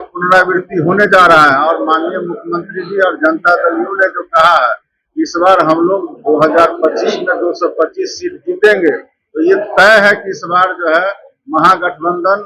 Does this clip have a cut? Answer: no; 0 cuts

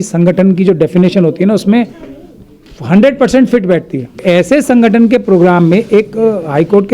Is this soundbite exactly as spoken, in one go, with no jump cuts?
no; 1 cut; at 4.2 s

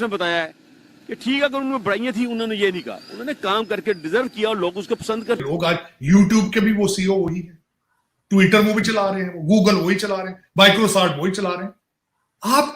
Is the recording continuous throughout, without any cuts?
no; 1 cut; at 5.4 s

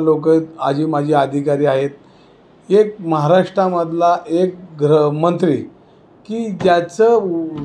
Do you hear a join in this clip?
no; 0 cuts

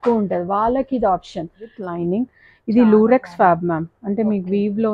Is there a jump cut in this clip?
yes; 1 cut; at 1.8 s

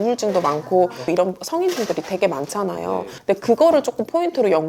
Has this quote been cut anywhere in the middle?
yes; 1 cut; at 1.1 s

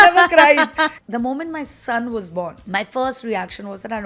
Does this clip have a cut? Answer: yes; 2 cuts; at 1.0 s, 2.6 s

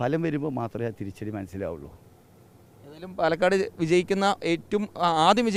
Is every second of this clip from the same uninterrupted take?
yes; 0 cuts

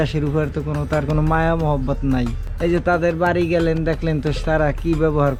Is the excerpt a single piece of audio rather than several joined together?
yes; 0 cuts

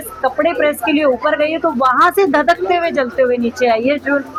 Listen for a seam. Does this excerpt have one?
no; 0 cuts

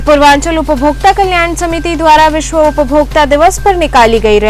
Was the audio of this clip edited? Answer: no; 0 cuts

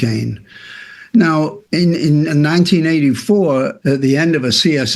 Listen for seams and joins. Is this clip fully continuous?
yes; 0 cuts

